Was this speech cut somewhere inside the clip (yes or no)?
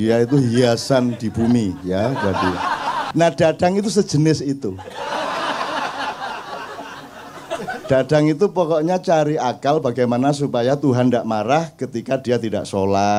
yes